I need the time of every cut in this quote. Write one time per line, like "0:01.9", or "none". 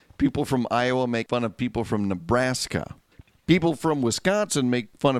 0:03.2